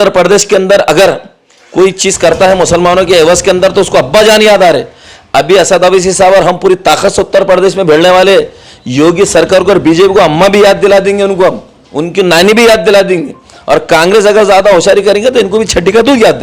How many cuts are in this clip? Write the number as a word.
zero